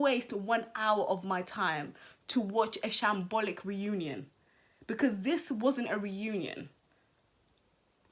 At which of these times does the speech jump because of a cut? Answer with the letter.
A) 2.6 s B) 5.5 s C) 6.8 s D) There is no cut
D